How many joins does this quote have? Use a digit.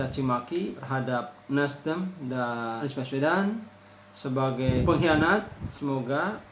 4